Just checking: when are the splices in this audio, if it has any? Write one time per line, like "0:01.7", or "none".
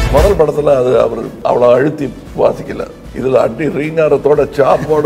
0:01.3
0:02.2
0:03.0